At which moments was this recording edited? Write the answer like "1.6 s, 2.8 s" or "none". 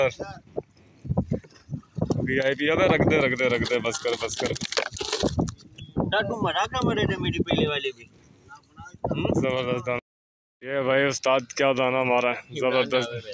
none